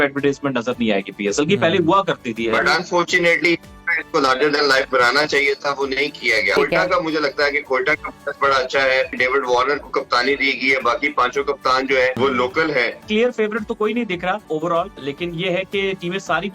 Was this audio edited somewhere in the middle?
yes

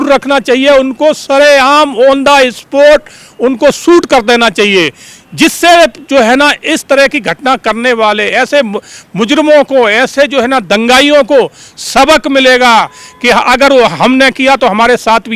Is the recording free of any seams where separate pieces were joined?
yes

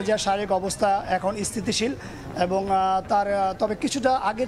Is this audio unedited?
yes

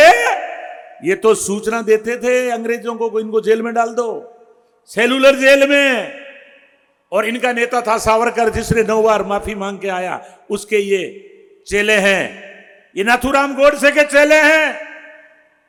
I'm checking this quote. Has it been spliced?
no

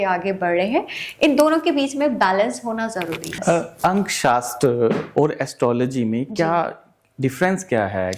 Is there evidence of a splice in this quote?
no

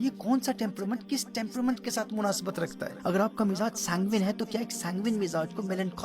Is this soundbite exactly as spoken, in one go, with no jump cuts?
no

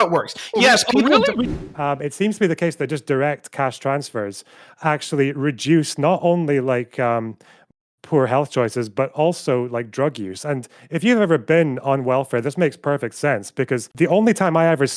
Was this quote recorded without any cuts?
no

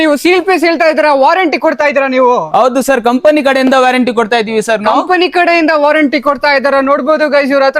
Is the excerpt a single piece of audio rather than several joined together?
yes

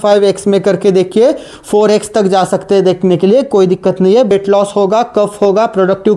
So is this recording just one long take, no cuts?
no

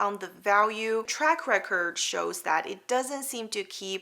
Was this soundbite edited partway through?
yes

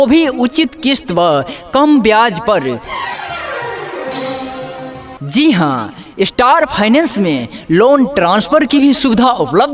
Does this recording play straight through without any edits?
yes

